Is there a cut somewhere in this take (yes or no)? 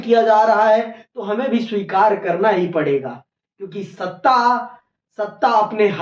no